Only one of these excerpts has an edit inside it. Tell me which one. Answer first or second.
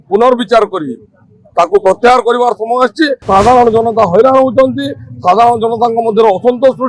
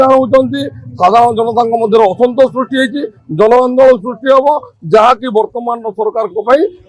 first